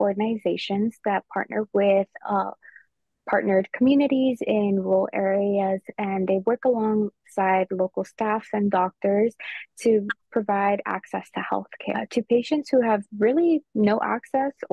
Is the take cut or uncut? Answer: uncut